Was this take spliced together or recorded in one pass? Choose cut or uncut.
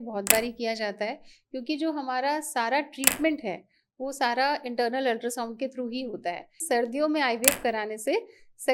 cut